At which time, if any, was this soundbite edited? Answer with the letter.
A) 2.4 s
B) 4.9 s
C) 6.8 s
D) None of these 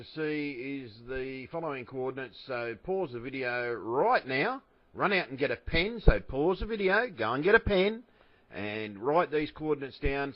B